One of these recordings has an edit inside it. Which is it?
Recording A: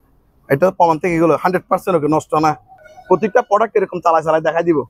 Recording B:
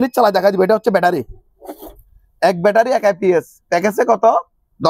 A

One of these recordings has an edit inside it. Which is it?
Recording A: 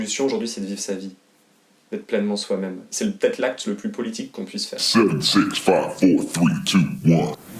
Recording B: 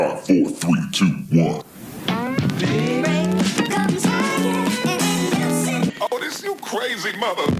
A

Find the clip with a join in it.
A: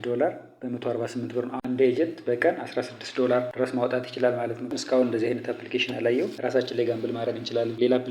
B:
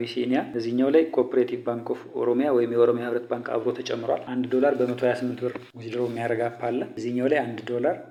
A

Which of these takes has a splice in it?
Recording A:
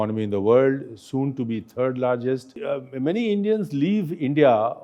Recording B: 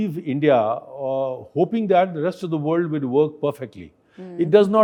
A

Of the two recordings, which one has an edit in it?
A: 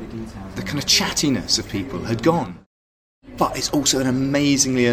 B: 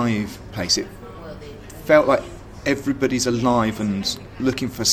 A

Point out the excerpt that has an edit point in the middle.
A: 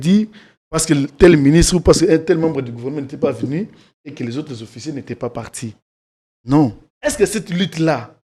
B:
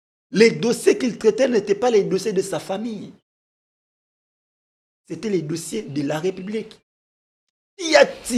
A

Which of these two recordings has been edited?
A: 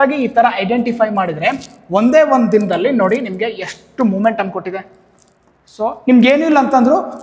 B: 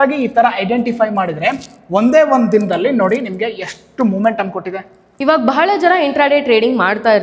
B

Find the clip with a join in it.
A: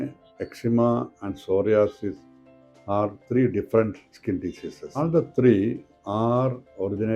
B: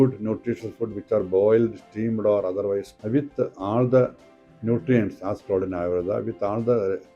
A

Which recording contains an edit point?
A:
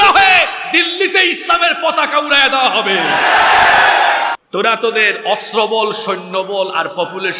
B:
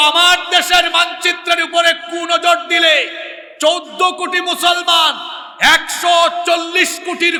A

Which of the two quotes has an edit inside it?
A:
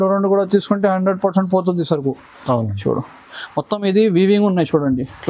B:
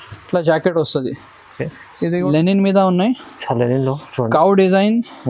B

